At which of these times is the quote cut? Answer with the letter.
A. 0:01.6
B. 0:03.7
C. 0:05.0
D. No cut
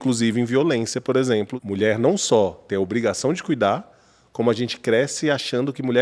A